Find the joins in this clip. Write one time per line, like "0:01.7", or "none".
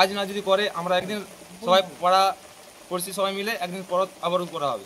0:01.0